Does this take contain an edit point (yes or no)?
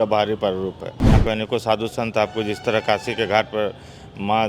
yes